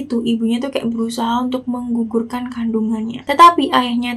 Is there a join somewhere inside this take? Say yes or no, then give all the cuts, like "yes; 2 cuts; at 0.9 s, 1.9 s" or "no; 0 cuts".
no; 0 cuts